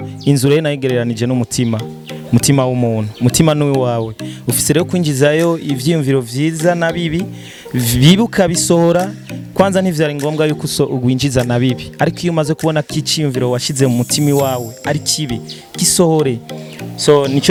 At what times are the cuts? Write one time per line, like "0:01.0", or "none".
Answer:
none

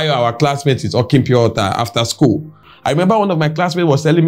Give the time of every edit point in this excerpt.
0:02.7

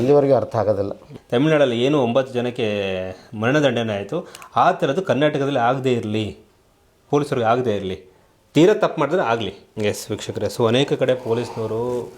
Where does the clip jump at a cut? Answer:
0:01.0
0:09.6

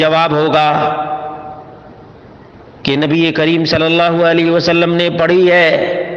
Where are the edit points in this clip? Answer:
none

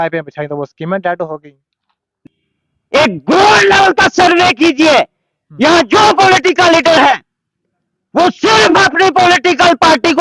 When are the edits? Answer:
0:02.1

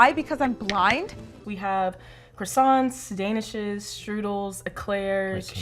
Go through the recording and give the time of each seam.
0:01.4

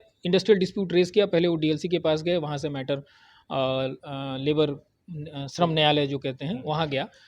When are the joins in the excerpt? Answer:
none

